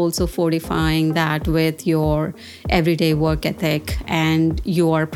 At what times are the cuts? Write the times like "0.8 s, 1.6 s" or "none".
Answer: none